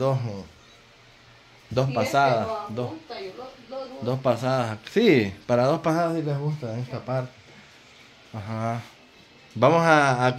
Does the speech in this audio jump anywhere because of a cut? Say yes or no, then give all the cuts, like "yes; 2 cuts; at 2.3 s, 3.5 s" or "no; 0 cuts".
yes; 1 cut; at 9.0 s